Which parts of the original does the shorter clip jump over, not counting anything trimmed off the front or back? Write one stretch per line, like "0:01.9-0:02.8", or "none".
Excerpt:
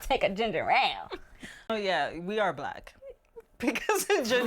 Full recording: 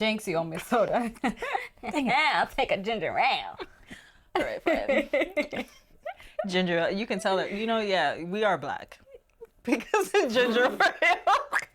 0:04.2-0:07.7